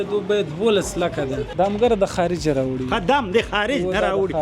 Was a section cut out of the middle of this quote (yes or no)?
yes